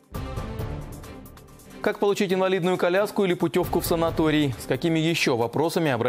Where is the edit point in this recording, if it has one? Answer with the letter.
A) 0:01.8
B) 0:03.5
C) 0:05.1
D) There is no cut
A